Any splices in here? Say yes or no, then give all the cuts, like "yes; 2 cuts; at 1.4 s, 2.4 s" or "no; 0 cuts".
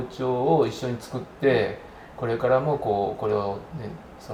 no; 0 cuts